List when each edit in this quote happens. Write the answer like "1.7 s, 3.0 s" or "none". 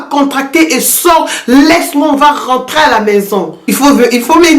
3.6 s